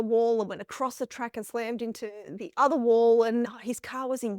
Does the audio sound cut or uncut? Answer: cut